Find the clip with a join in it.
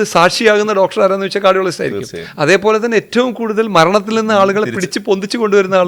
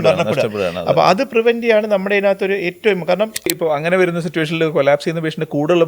second; 1 cut; at 3.5 s

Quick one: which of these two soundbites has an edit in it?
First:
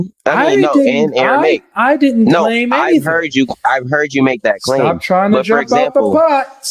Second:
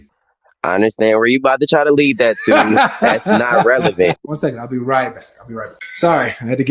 second; 2 cuts; at 4.3 s, 5.8 s

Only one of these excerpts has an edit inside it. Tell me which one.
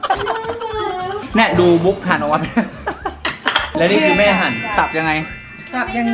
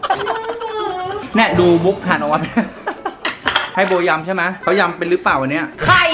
second; 1 cut; at 3.7 s

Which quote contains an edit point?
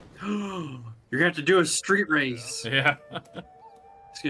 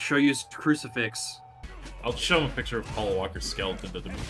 second; 1 cut; at 1.3 s

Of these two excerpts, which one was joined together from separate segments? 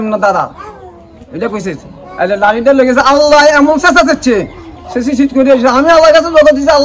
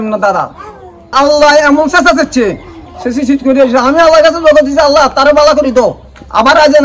second; 1 cut; at 1.1 s

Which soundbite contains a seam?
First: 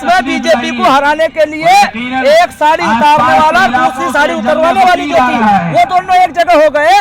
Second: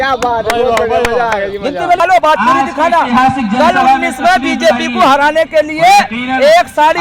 second; 1 cut; at 2.0 s

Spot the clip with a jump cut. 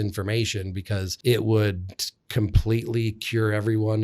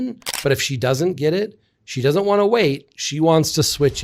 first; 1 cut; at 1.1 s

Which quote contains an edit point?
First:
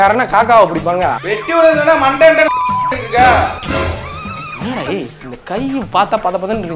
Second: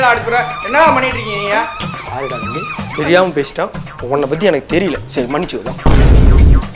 first; 1 cut; at 1.2 s

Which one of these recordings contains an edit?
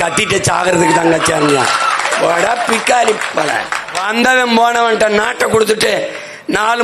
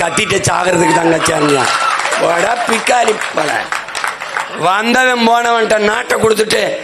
first; 1 cut; at 4.0 s

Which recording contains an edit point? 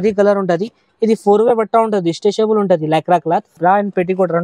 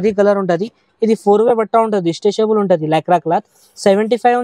first; 1 cut; at 3.5 s

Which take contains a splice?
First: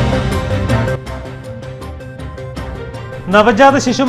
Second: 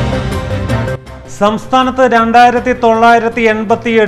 first; 1 cut; at 1.0 s

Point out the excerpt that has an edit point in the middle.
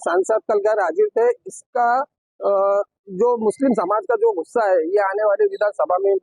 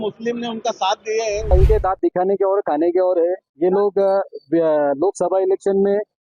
second; 1 cut; at 1.5 s

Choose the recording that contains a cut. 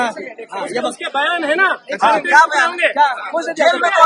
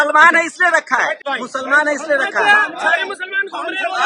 second; 1 cut; at 1.2 s

